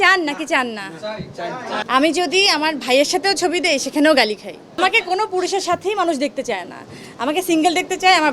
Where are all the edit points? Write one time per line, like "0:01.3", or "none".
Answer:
0:01.8
0:04.8